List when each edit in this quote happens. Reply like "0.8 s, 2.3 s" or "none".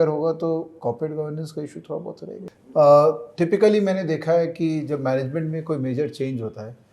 2.4 s